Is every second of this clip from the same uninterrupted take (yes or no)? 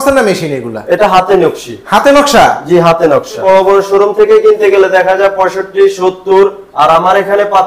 no